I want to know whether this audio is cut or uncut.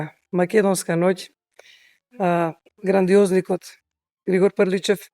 uncut